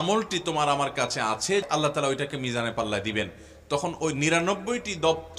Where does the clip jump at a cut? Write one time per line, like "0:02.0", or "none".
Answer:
0:01.6